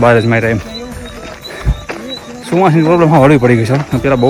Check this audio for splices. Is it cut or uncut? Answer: uncut